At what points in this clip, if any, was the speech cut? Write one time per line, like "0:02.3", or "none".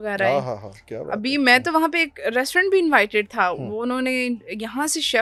none